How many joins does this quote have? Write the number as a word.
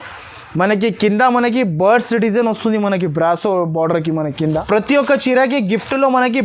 one